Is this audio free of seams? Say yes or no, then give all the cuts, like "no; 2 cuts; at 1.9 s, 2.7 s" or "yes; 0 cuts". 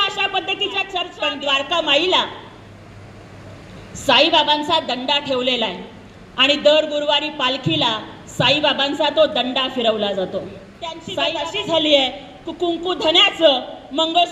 no; 2 cuts; at 1.0 s, 11.1 s